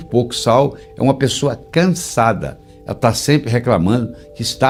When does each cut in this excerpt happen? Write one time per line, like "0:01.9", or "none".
none